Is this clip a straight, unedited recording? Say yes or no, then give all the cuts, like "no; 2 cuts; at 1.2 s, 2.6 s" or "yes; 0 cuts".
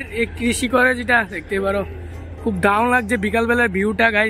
yes; 0 cuts